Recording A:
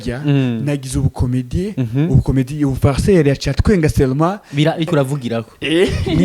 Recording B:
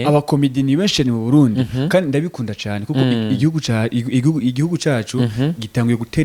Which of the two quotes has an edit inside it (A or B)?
A